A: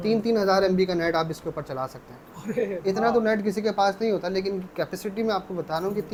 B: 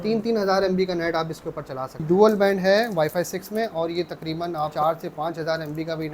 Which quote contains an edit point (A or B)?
B